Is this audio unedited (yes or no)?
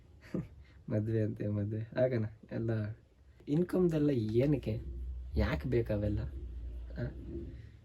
no